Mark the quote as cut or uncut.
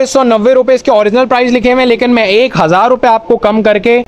uncut